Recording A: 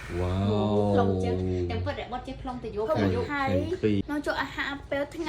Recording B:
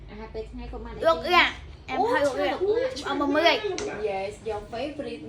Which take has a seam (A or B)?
A